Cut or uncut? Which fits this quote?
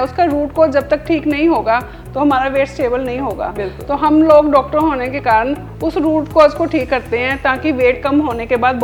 uncut